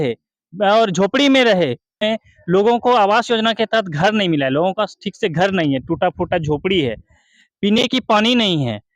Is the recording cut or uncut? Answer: cut